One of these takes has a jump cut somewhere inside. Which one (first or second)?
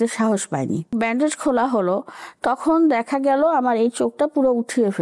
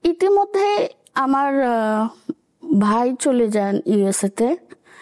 first